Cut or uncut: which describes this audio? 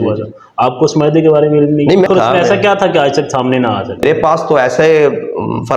cut